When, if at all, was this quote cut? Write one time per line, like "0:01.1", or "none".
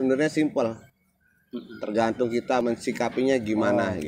0:02.6

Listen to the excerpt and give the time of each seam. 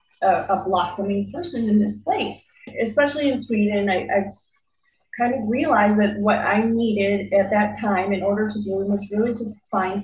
0:02.6

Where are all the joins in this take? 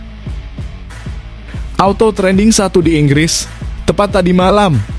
0:00.8
0:01.8

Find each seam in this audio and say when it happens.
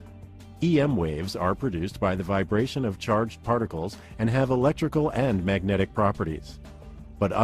0:02.4

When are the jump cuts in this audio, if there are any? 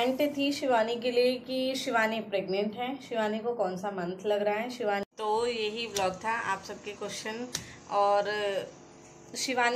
0:05.0

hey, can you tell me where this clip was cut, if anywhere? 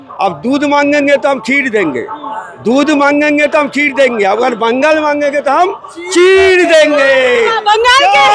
none

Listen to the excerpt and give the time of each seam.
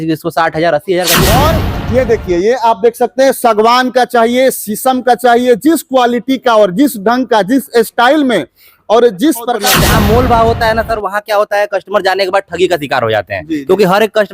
0:01.2
0:09.8

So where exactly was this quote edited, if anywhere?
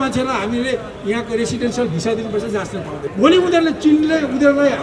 0:03.0

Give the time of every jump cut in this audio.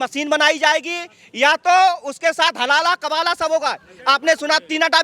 none

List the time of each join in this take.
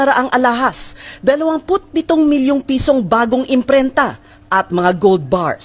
none

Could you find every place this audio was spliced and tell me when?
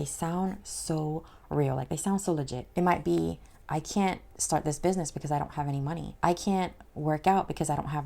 0:02.6
0:06.1

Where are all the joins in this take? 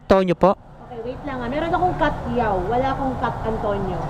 none

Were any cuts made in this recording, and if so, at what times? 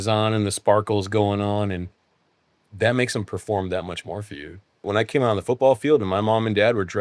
0:04.8

